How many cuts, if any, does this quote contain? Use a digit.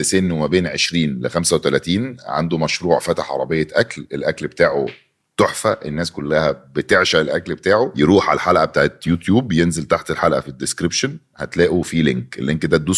1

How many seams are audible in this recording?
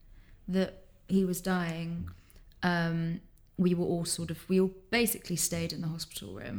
0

